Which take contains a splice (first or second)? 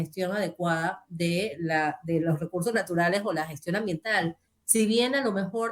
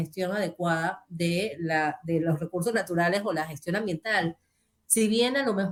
first